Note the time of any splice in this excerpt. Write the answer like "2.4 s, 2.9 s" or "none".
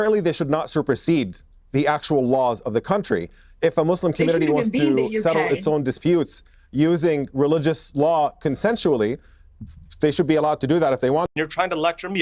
11.3 s